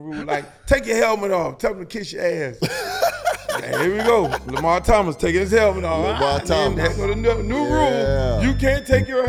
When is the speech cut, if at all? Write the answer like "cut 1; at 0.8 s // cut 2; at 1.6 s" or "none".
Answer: none